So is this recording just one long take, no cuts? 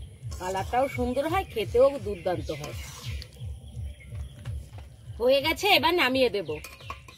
no; 1 cut; at 4.7 s

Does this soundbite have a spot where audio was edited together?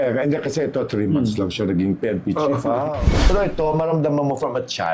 yes; 1 cut; at 3.0 s

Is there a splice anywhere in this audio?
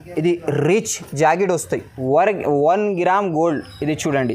yes; 1 cut; at 1.9 s

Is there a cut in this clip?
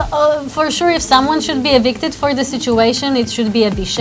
no; 0 cuts

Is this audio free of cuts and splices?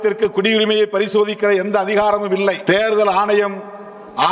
no; 1 cut; at 2.6 s

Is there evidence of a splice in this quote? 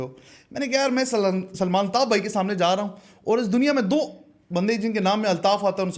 no; 0 cuts

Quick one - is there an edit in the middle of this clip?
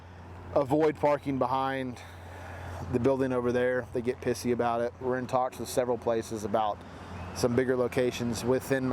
yes; 1 cut; at 5.0 s

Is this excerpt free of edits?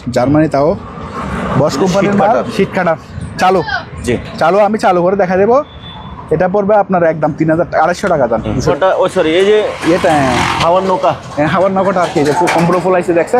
no; 1 cut; at 8.7 s

